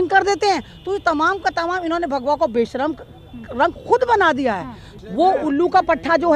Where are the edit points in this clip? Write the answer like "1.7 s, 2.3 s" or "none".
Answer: 4.9 s